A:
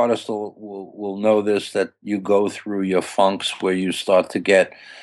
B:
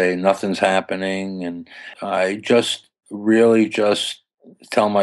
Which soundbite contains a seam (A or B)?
B